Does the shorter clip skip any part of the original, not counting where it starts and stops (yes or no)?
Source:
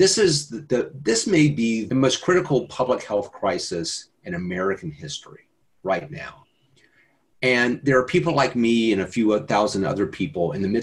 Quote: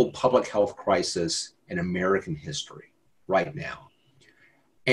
no